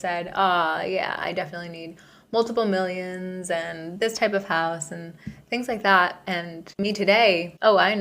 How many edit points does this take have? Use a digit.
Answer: 1